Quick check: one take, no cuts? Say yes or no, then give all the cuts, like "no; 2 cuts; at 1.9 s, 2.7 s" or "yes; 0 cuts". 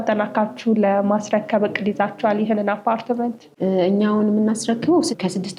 yes; 0 cuts